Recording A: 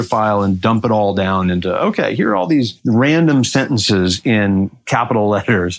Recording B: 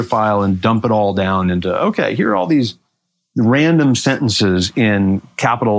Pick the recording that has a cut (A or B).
A